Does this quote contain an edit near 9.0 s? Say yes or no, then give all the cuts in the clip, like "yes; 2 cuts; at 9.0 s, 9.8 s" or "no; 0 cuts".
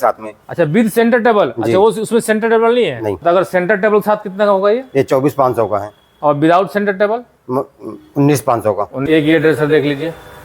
yes; 2 cuts; at 3.2 s, 9.0 s